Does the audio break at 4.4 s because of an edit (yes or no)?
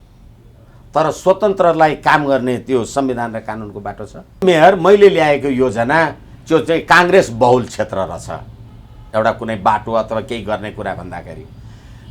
yes